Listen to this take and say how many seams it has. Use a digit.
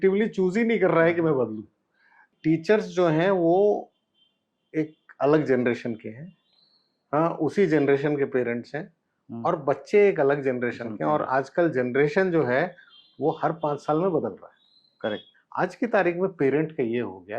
2